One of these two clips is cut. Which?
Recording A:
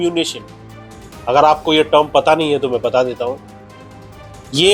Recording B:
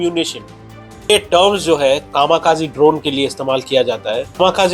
B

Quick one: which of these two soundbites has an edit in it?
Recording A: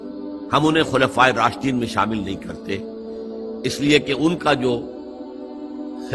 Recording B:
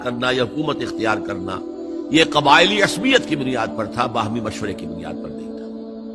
B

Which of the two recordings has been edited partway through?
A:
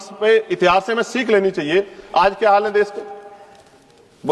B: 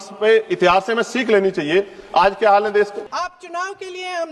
B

